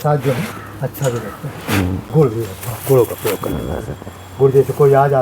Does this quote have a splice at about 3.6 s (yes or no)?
no